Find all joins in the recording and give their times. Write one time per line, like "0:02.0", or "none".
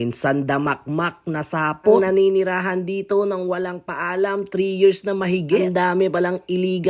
none